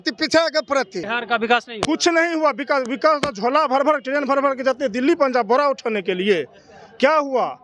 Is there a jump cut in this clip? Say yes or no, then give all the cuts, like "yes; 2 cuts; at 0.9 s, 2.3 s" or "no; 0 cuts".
yes; 1 cut; at 1.1 s